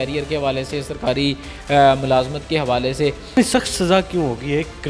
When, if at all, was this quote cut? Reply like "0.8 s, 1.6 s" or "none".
3.4 s